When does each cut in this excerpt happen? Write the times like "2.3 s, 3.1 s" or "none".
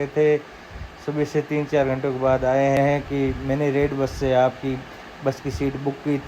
2.8 s